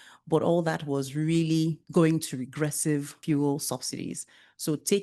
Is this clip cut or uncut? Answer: cut